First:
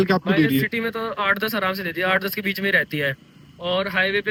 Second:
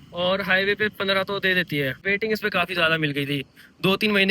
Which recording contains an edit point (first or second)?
second